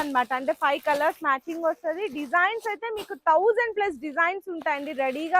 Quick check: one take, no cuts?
yes; 0 cuts

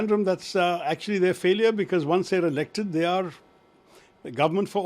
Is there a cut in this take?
no; 0 cuts

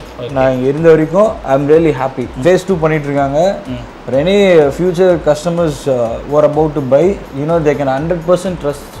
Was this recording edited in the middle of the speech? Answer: no; 0 cuts

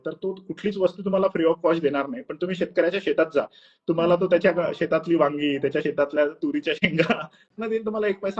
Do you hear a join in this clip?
yes; 1 cut; at 7.3 s

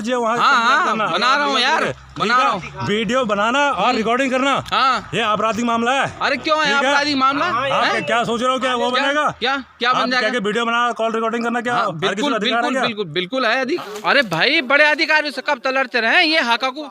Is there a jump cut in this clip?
yes; 1 cut; at 13.8 s

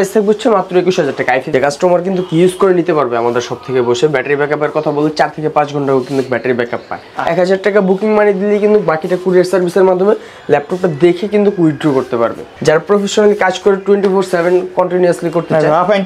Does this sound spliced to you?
yes; 3 cuts; at 1.5 s, 7.1 s, 12.5 s

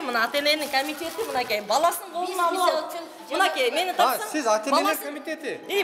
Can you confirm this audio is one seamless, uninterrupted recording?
yes; 0 cuts

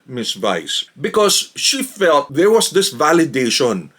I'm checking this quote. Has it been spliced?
yes; 1 cut; at 2.3 s

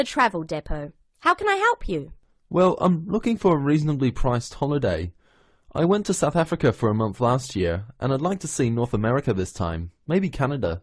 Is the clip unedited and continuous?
yes; 0 cuts

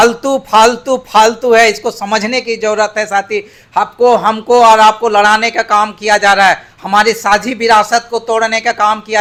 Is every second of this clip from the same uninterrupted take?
yes; 0 cuts

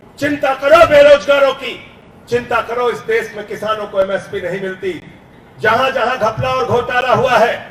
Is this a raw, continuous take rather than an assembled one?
no; 1 cut; at 5.2 s

